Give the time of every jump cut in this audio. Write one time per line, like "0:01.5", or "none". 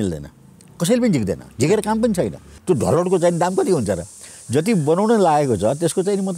0:02.5